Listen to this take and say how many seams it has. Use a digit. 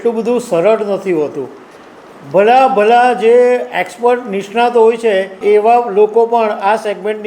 1